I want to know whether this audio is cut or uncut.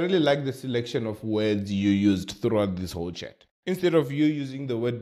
uncut